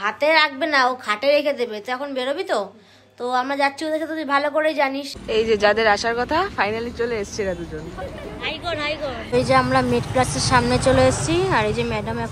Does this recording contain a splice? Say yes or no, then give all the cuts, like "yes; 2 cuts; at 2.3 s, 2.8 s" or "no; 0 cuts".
yes; 2 cuts; at 5.1 s, 9.2 s